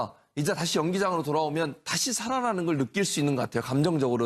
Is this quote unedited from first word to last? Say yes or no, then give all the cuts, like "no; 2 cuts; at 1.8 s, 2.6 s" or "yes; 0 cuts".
no; 1 cut; at 3.1 s